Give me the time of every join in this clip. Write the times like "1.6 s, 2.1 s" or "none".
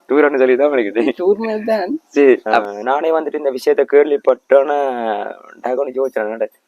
2.4 s

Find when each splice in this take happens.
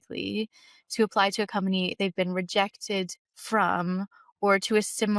none

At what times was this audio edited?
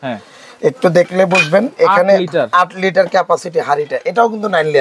none

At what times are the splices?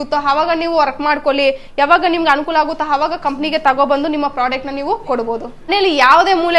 5.6 s

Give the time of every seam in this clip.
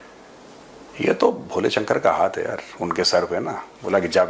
none

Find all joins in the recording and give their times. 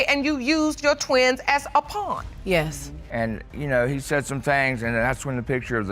3.0 s

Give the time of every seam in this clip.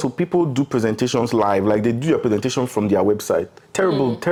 none

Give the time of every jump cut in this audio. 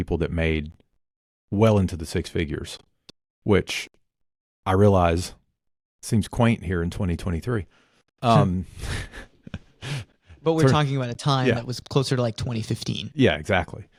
none

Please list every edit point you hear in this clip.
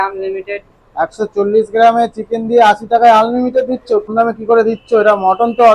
4.1 s

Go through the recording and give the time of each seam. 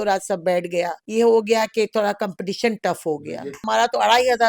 1.0 s, 3.6 s

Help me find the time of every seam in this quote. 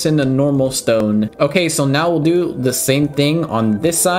1.3 s

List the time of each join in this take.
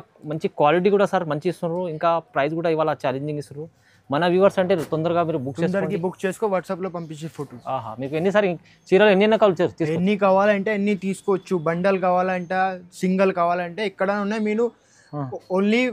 none

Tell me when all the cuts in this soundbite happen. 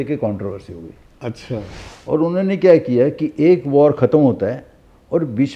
1.8 s

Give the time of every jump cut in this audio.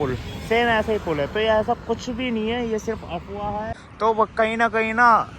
3.8 s

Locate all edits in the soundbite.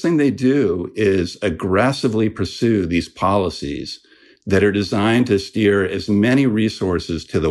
none

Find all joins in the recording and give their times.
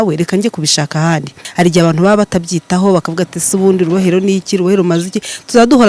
1.4 s

